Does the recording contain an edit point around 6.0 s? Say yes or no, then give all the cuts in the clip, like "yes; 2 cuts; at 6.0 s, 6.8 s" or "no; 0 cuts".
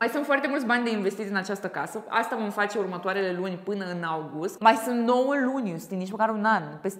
no; 1 cut; at 4.5 s